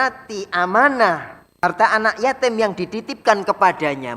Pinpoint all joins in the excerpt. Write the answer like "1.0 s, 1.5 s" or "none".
1.4 s